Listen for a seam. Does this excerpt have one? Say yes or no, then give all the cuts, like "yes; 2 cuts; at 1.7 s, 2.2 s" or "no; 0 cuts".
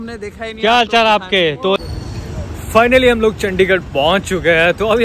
yes; 1 cut; at 1.8 s